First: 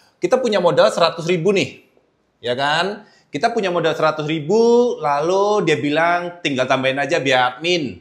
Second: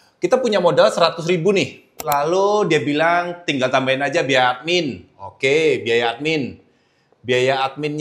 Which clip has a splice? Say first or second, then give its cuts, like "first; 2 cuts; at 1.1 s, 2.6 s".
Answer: second; 1 cut; at 2.0 s